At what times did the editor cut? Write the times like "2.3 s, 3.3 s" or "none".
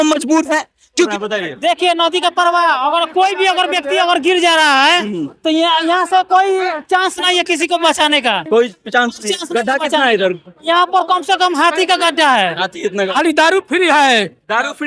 1.1 s, 13.1 s